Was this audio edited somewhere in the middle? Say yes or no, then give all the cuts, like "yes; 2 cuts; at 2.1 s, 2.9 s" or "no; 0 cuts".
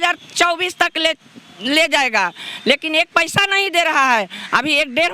no; 0 cuts